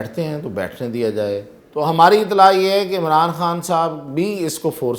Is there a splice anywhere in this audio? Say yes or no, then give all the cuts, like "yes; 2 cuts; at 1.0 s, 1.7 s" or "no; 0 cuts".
yes; 1 cut; at 1.6 s